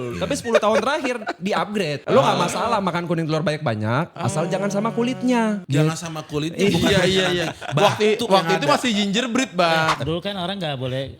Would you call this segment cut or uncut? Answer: cut